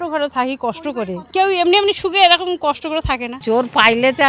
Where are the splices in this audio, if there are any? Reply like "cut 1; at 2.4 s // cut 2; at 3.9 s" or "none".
cut 1; at 1.2 s // cut 2; at 3.3 s